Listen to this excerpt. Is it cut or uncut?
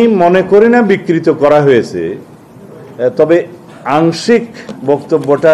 uncut